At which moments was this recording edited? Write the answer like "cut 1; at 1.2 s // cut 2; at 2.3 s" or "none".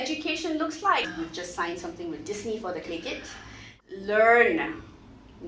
cut 1; at 1.1 s // cut 2; at 3.7 s